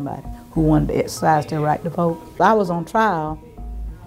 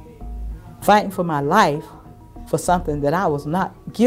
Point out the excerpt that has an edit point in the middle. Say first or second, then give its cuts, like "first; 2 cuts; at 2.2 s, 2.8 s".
first; 1 cut; at 2.4 s